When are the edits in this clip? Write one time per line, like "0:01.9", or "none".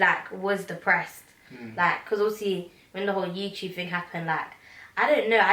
none